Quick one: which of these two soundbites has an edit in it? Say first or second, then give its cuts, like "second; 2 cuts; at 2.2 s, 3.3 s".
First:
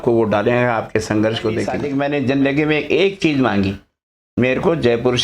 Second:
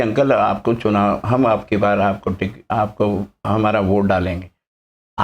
first; 1 cut; at 1.8 s